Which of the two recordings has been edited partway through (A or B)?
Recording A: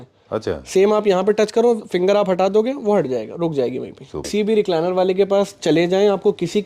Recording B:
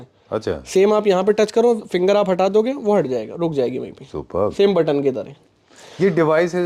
A